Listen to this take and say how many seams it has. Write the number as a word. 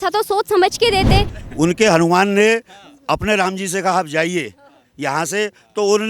one